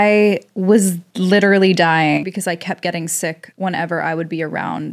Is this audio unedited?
no; 1 cut; at 2.2 s

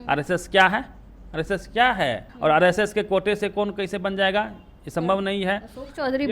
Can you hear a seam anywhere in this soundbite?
yes; 1 cut; at 2.3 s

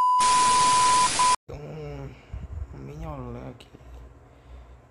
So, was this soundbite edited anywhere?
yes; 1 cut; at 1.4 s

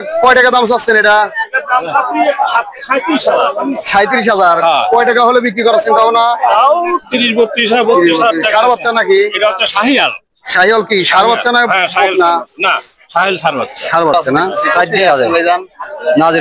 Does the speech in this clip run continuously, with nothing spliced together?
no; 1 cut; at 14.7 s

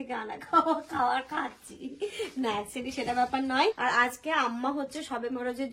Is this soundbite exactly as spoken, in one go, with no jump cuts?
yes; 0 cuts

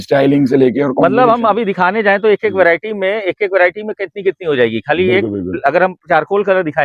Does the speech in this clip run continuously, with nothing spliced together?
yes; 0 cuts

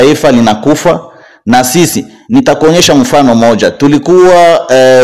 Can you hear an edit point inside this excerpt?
no; 0 cuts

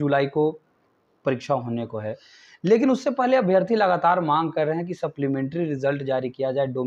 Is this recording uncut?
yes; 0 cuts

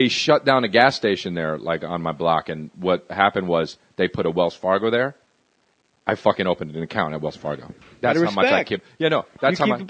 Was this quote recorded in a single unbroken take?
no; 1 cut; at 2.0 s

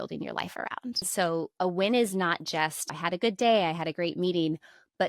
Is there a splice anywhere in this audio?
yes; 2 cuts; at 1.0 s, 2.9 s

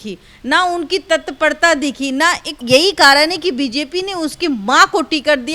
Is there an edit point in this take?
yes; 1 cut; at 2.5 s

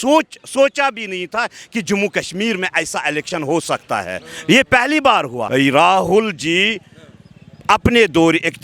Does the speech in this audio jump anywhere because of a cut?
yes; 1 cut; at 5.4 s

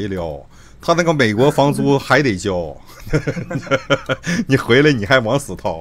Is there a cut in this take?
no; 0 cuts

